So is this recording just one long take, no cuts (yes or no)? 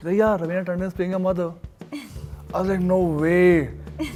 yes